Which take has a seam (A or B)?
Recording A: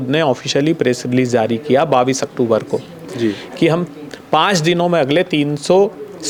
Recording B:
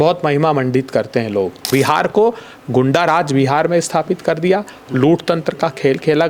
B